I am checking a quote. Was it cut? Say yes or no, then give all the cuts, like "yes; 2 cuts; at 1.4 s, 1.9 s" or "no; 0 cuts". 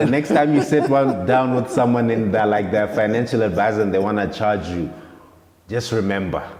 no; 0 cuts